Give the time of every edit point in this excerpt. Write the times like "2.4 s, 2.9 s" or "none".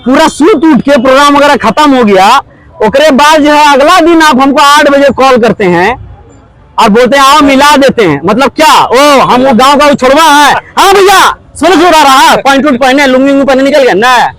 none